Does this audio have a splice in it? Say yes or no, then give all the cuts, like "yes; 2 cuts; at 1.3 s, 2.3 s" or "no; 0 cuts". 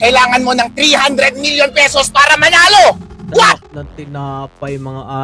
no; 0 cuts